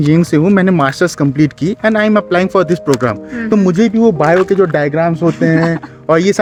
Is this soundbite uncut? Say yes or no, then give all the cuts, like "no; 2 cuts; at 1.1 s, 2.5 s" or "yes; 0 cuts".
yes; 0 cuts